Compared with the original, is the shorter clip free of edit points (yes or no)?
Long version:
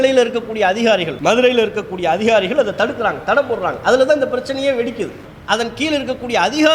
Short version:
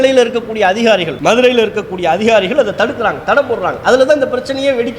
yes